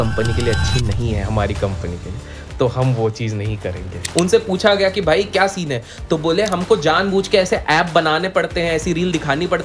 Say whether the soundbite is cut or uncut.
cut